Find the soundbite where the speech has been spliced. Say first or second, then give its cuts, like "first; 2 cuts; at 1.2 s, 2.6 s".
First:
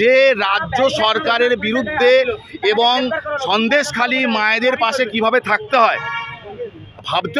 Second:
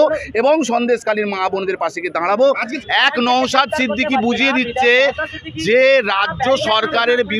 second; 1 cut; at 2.8 s